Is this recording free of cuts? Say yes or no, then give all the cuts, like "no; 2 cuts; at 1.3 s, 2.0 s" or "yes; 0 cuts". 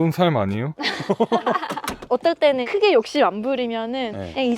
yes; 0 cuts